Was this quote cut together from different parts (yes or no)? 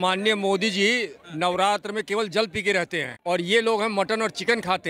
no